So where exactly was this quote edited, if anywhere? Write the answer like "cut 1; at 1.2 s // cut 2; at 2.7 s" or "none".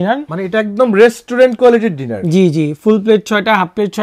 none